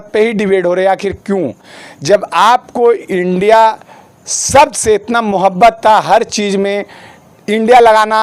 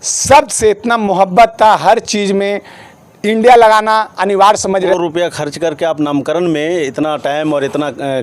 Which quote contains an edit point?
second; 1 cut; at 4.9 s

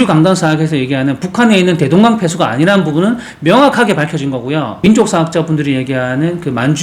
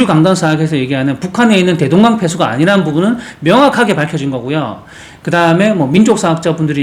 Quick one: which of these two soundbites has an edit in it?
first; 1 cut; at 4.8 s

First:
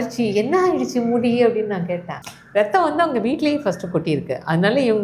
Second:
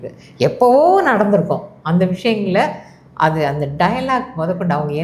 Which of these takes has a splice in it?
first; 1 cut; at 2.4 s

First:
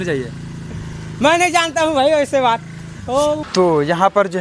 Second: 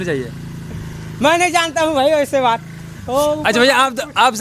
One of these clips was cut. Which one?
first; 1 cut; at 3.4 s

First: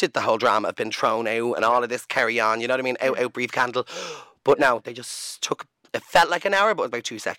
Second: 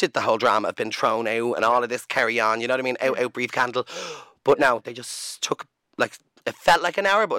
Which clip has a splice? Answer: first; 1 cut; at 5.8 s

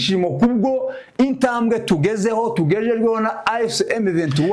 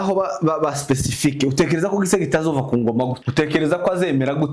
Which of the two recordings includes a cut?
second; 1 cut; at 3.2 s

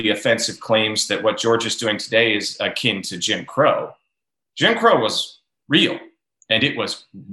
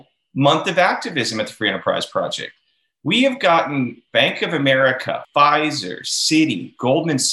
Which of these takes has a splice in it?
second; 2 cuts; at 4.0 s, 5.2 s

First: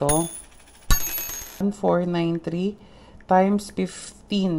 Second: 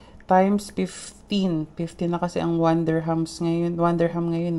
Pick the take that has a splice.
first; 1 cut; at 1.6 s

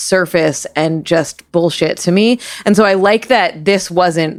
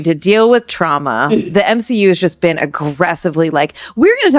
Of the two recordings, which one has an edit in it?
second; 1 cut; at 1.4 s

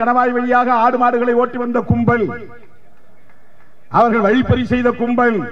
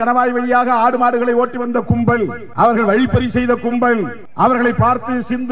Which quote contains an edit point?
second; 2 cuts; at 2.4 s, 4.2 s

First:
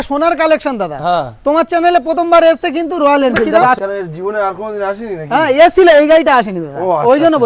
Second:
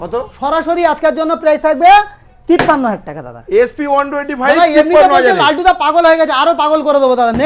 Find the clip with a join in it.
first; 1 cut; at 3.8 s

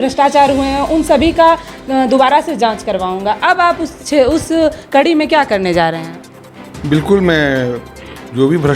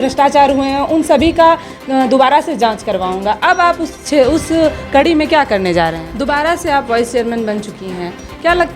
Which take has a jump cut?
second; 1 cut; at 6.1 s

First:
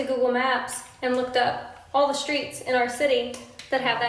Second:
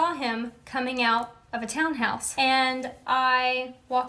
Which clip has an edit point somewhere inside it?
second; 1 cut; at 2.2 s

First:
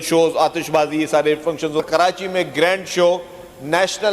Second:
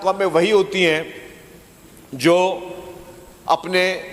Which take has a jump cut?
first; 1 cut; at 1.8 s

